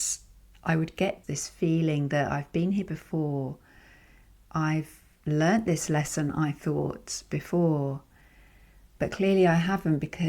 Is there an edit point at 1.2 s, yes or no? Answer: yes